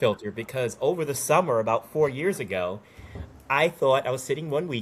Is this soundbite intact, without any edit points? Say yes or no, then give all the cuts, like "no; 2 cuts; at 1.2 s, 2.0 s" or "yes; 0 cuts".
yes; 0 cuts